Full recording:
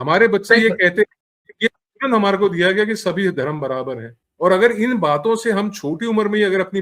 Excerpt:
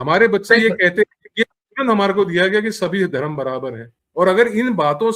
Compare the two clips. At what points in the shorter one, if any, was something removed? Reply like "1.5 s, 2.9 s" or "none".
1.2 s